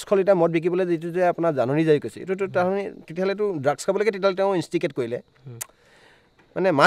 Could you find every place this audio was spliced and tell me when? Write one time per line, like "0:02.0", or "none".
none